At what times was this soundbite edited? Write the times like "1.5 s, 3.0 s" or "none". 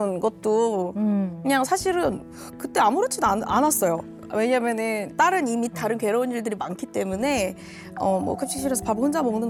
none